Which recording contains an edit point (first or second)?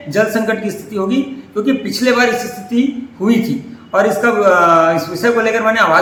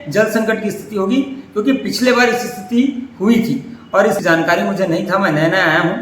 second